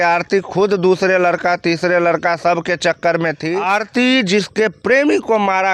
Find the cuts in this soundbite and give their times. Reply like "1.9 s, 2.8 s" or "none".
3.5 s